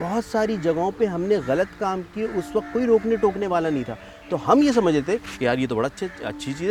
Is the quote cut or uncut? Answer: uncut